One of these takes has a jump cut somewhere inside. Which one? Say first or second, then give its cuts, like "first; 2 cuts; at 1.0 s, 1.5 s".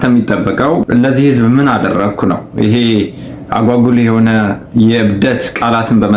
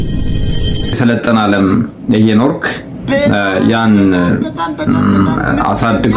second; 1 cut; at 1.0 s